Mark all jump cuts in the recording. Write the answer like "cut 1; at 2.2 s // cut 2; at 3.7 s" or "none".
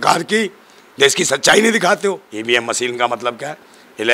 cut 1; at 2.3 s